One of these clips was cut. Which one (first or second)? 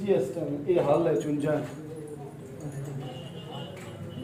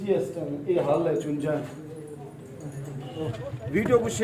second